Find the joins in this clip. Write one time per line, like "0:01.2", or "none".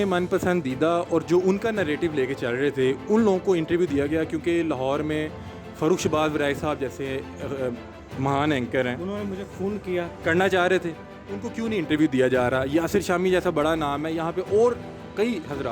none